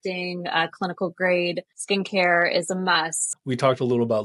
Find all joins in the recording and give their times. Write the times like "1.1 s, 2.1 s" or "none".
1.7 s, 3.2 s